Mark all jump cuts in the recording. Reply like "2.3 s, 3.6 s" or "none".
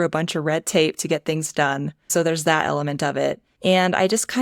1.9 s, 3.5 s